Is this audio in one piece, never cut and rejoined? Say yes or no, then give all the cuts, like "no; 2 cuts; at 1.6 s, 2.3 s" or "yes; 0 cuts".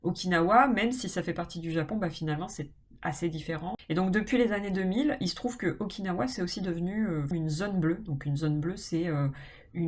no; 2 cuts; at 3.8 s, 7.3 s